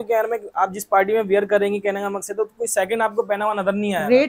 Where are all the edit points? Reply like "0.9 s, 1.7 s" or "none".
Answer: none

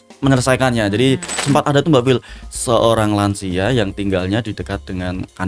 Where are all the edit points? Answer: 1.3 s

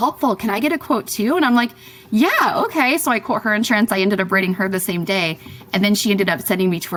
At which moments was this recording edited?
none

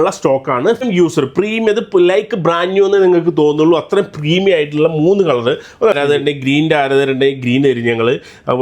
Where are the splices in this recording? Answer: 0.8 s, 6.0 s

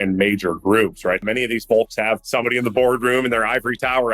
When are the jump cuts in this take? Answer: 1.2 s, 2.2 s

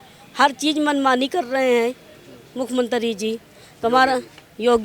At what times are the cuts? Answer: none

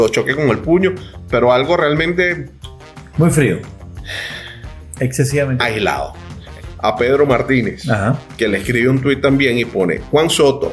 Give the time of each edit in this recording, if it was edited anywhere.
6.5 s

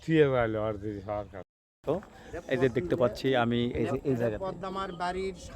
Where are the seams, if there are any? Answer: 1.8 s

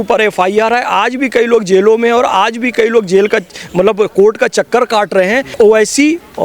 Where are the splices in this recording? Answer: 5.5 s

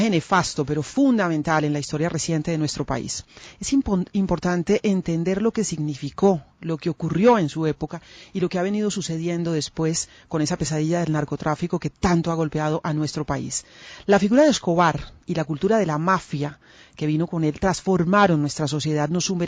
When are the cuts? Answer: none

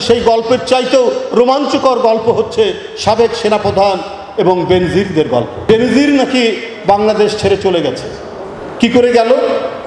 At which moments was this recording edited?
5.5 s

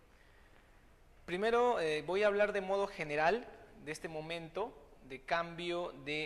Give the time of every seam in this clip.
1.4 s

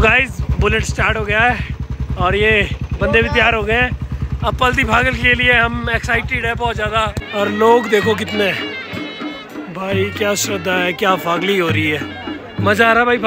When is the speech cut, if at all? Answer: 7.2 s

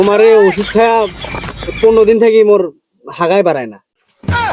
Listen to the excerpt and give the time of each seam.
none

